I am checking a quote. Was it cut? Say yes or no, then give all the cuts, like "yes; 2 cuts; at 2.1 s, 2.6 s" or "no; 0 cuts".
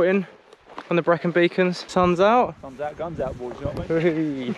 yes; 1 cut; at 1.8 s